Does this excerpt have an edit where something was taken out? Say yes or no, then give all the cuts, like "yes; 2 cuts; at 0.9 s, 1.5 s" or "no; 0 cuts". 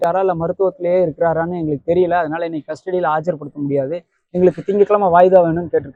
no; 0 cuts